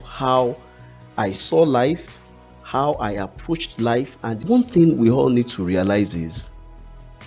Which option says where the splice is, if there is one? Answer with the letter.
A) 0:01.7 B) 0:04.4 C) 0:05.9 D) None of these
B